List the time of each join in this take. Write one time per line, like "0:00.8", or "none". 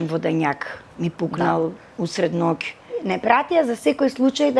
0:03.0